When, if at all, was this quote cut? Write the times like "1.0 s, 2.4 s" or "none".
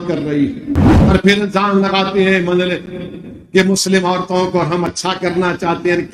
0.9 s

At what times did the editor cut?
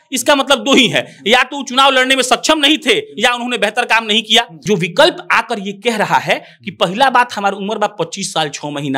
4.6 s

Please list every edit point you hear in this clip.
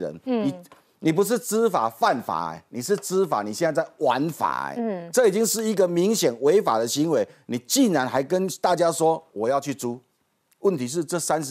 none

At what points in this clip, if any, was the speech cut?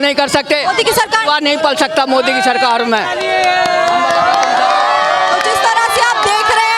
none

